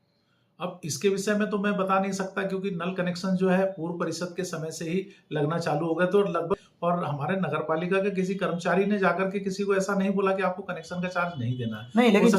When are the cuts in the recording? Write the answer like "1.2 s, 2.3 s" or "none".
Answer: 6.6 s